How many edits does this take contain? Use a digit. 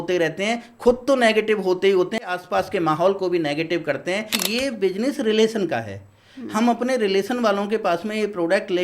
2